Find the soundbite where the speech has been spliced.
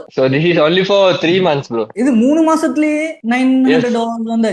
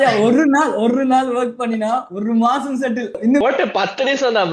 second; 1 cut; at 3.4 s

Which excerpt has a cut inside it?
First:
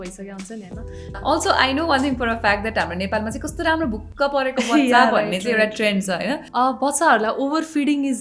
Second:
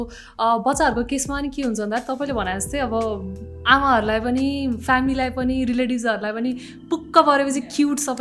first; 2 cuts; at 1.1 s, 6.4 s

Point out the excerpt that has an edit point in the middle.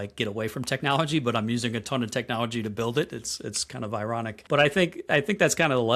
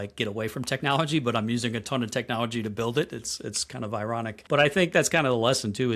second; 1 cut; at 4.9 s

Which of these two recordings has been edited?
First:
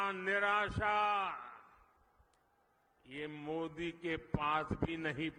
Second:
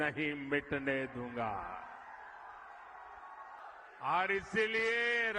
second; 1 cut; at 3.6 s

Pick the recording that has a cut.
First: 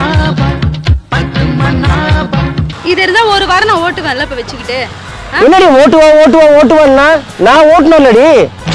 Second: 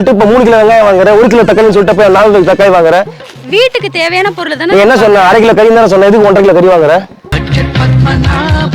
first; 1 cut; at 2.7 s

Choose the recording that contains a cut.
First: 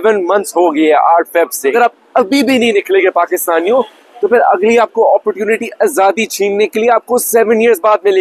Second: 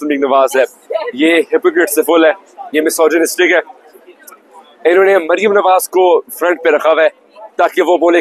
first; 1 cut; at 1.7 s

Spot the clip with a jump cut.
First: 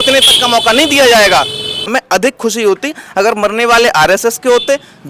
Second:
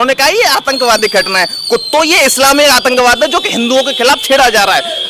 first; 1 cut; at 1.8 s

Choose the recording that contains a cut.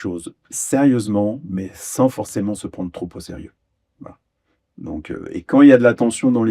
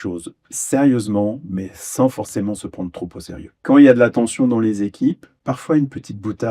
second; 2 cuts; at 3.6 s, 5.3 s

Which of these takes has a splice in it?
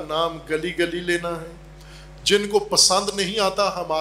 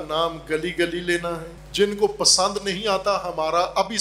second; 1 cut; at 1.5 s

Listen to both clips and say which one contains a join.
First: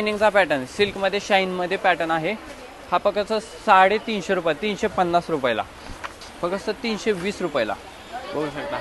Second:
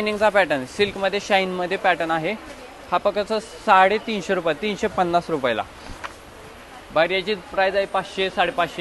first; 1 cut; at 6.2 s

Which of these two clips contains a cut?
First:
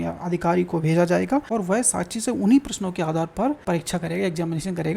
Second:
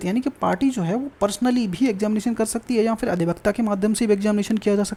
first; 2 cuts; at 1.5 s, 3.6 s

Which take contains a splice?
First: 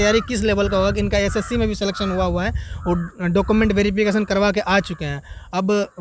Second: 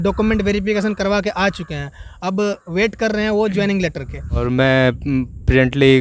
second; 1 cut; at 4.4 s

